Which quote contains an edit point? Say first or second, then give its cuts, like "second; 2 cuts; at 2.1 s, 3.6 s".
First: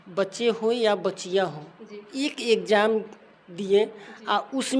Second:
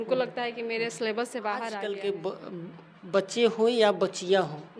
second; 1 cut; at 1.8 s